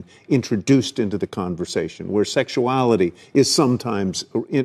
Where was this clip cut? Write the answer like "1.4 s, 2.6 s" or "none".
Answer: none